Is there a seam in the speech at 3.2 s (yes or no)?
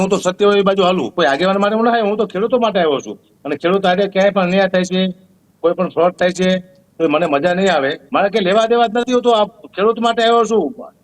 no